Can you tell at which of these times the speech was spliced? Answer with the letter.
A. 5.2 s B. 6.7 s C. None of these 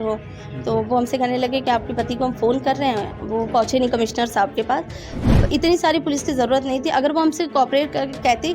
A